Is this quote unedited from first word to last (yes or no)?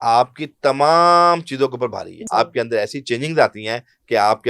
no